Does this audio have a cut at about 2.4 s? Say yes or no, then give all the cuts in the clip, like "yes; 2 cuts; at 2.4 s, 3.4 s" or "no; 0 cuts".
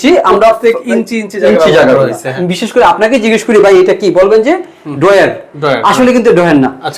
yes; 1 cut; at 2.4 s